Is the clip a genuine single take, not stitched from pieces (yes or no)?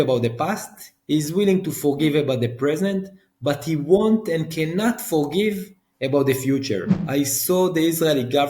no